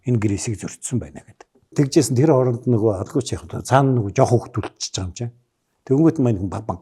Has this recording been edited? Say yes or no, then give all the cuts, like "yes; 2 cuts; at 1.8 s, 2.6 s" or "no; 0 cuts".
yes; 1 cut; at 1.7 s